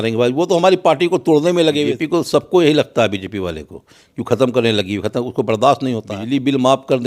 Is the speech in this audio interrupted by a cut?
yes; 2 cuts; at 1.9 s, 6.1 s

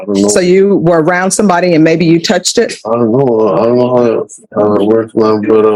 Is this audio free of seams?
yes; 0 cuts

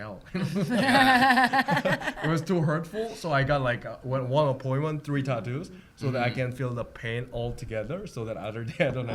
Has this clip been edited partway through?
no; 0 cuts

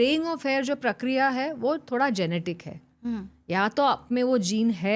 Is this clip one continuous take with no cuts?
yes; 0 cuts

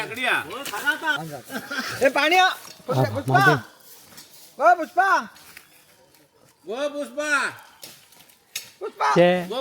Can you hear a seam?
yes; 1 cut; at 1.1 s

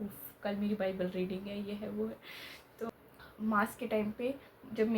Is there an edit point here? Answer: yes; 1 cut; at 2.9 s

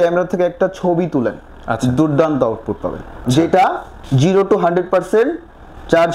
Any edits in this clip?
yes; 1 cut; at 3.3 s

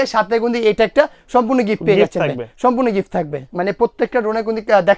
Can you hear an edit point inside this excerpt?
no; 0 cuts

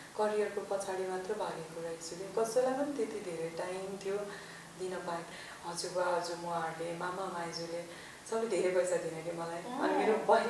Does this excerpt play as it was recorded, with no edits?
no; 1 cut; at 5.4 s

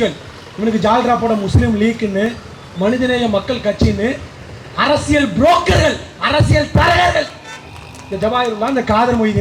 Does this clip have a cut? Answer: no; 0 cuts

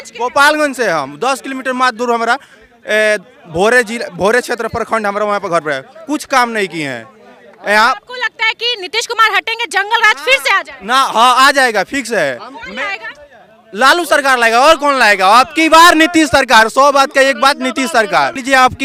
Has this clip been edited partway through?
no; 0 cuts

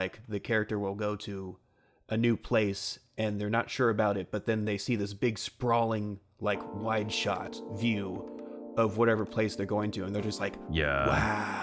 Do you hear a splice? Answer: no; 0 cuts

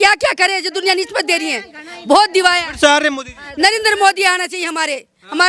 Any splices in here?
no; 0 cuts

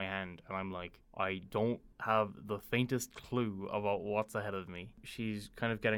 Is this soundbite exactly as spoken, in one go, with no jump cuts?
no; 1 cut; at 5.0 s

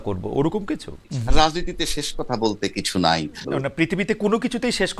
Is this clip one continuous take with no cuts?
no; 2 cuts; at 1.1 s, 3.5 s

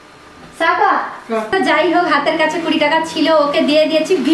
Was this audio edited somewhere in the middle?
yes; 1 cut; at 1.5 s

